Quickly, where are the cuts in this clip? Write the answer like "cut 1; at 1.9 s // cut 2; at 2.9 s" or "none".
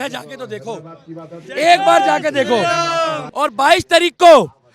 cut 1; at 3.2 s